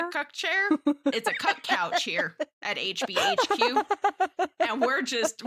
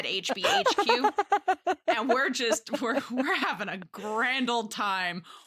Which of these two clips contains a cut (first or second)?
first